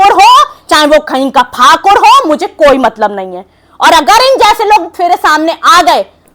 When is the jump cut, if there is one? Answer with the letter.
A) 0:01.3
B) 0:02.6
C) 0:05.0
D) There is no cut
D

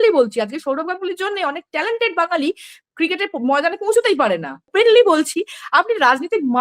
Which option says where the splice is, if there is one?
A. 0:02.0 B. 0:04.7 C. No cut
B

